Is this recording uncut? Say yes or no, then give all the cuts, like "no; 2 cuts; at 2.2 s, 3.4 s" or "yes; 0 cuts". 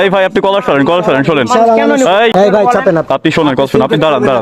no; 1 cut; at 2.3 s